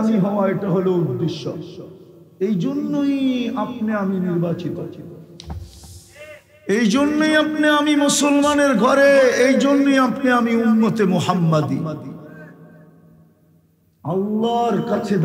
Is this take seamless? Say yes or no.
yes